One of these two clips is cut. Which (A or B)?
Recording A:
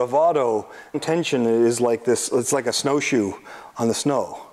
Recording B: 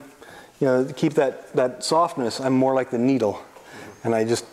A